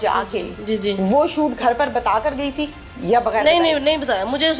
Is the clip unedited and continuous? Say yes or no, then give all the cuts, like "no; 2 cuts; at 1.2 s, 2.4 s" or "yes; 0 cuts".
yes; 0 cuts